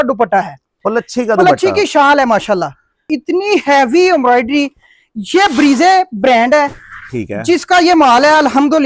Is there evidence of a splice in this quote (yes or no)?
yes